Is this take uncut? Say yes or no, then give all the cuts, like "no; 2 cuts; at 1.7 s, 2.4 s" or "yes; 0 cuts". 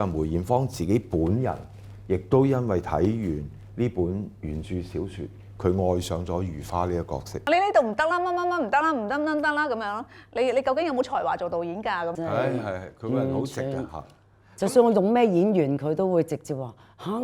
no; 2 cuts; at 7.5 s, 12.1 s